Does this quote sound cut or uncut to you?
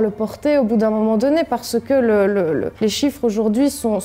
uncut